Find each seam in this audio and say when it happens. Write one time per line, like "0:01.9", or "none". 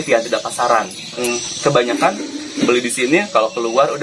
0:01.2